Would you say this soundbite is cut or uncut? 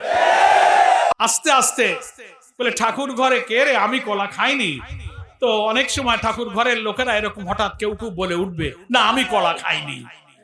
cut